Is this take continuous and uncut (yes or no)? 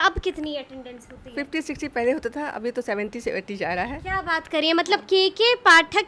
yes